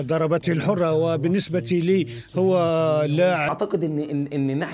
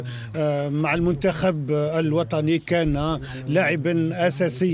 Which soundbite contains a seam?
first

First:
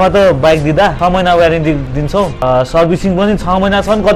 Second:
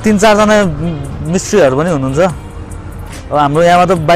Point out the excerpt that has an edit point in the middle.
first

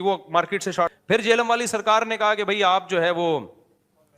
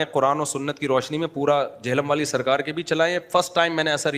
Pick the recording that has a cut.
first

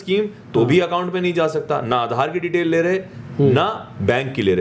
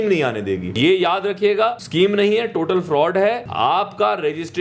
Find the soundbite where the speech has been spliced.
second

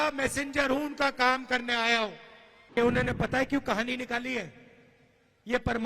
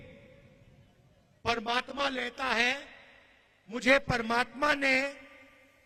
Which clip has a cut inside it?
first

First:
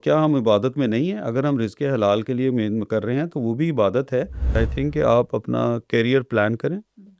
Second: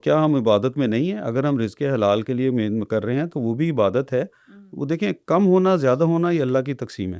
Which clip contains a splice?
first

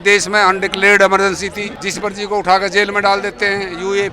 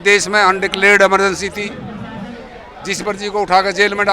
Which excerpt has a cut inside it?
first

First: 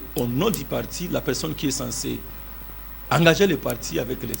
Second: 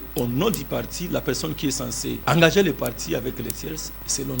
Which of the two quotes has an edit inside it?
second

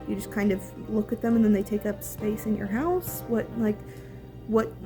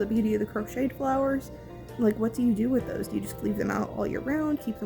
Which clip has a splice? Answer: second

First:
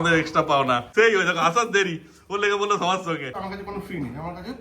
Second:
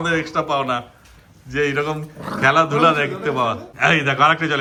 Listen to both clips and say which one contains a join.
first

